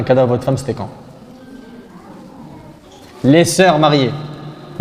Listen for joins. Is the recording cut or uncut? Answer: uncut